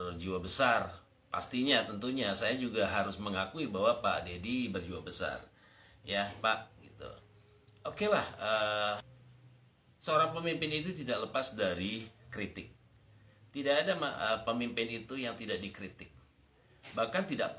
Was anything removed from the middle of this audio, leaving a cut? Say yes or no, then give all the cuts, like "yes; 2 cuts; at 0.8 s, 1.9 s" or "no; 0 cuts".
no; 0 cuts